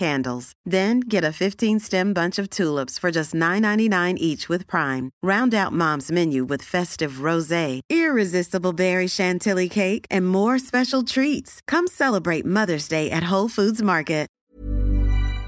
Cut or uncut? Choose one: cut